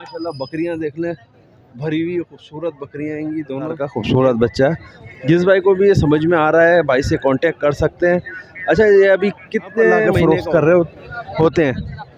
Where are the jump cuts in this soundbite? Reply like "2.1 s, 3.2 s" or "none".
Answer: 3.9 s, 10.1 s

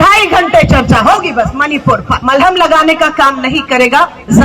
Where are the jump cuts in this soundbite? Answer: 2.1 s

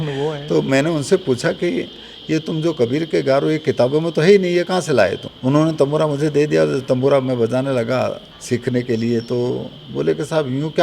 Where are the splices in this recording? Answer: 5.3 s, 8.3 s

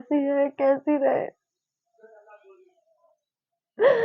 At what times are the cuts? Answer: none

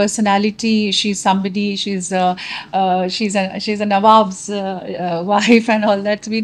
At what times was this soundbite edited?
none

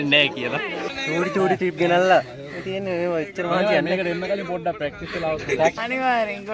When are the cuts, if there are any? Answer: 0.9 s, 5.8 s

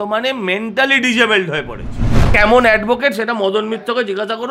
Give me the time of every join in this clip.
2.3 s

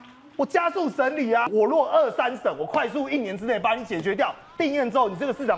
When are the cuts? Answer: 1.5 s

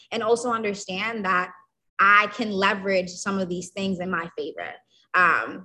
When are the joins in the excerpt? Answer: 4.1 s

